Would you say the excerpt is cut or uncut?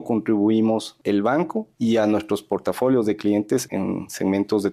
cut